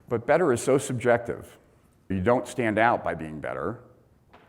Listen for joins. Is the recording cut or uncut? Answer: cut